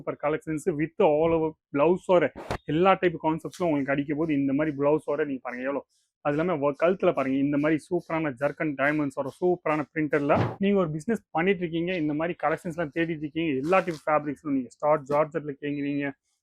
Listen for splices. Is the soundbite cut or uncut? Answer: cut